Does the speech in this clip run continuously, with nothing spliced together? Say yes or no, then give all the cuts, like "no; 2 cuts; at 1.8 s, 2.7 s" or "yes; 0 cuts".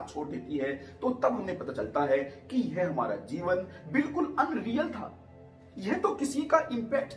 yes; 0 cuts